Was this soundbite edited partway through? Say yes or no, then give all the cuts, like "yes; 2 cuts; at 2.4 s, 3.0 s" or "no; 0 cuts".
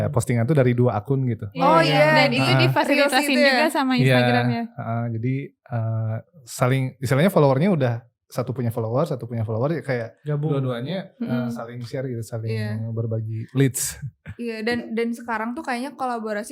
no; 0 cuts